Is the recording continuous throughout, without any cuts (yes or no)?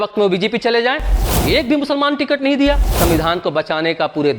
no